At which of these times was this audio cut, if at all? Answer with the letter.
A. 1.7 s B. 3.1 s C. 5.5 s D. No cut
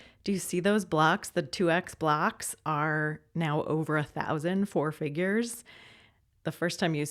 D